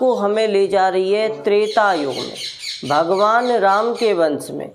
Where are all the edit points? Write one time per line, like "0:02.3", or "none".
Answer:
none